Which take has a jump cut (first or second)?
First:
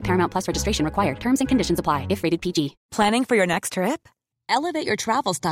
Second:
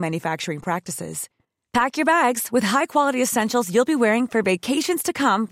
first